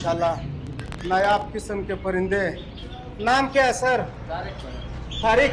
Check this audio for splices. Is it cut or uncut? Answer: uncut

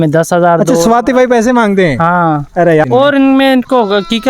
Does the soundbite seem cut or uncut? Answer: cut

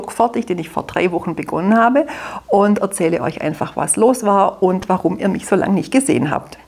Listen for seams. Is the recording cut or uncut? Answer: uncut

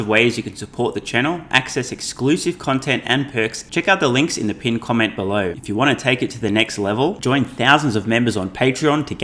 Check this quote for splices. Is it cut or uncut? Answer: cut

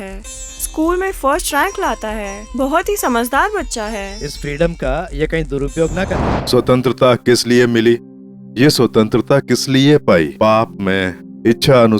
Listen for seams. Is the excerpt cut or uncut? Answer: cut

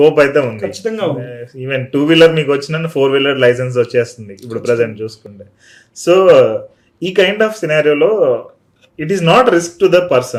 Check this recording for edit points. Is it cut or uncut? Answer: uncut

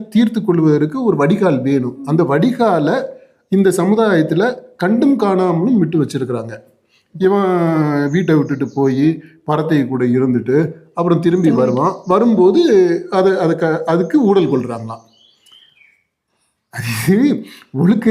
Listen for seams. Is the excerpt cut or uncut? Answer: cut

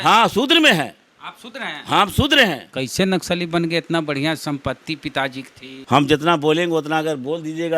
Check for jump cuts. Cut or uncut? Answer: cut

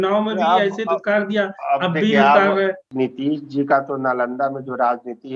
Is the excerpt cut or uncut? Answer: cut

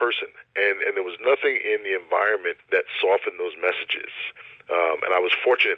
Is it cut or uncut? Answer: cut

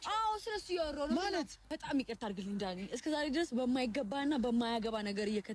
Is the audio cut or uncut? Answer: cut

